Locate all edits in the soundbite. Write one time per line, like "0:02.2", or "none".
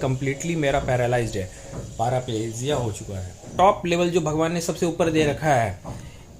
0:03.5